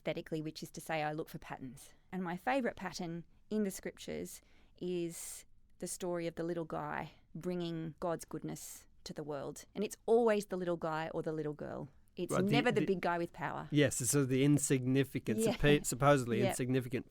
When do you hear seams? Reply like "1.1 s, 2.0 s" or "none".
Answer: 2.1 s, 7.2 s, 7.9 s